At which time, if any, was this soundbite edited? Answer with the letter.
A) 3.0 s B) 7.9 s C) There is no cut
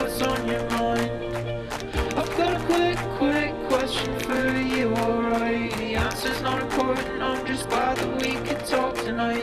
C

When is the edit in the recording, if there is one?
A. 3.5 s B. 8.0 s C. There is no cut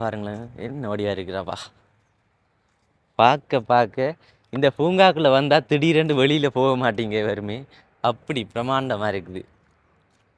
C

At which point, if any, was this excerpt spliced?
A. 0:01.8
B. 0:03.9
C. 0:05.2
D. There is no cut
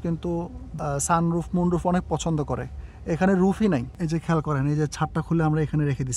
B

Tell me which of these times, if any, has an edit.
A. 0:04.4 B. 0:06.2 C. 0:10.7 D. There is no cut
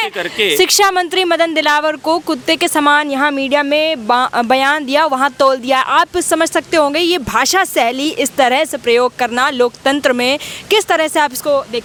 D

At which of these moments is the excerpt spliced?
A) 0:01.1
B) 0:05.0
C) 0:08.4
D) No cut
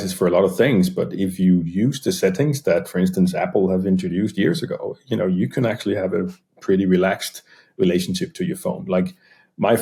D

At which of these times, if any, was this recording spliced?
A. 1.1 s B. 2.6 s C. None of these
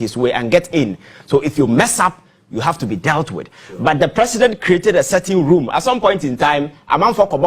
A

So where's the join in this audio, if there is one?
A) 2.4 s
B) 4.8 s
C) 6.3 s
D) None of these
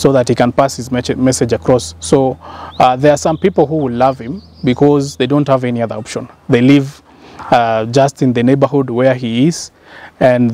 D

